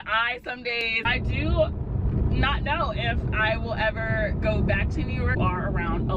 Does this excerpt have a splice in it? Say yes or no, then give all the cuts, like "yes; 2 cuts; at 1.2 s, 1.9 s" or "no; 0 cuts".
yes; 2 cuts; at 1.0 s, 5.3 s